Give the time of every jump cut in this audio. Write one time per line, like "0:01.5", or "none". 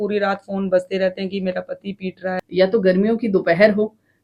0:02.4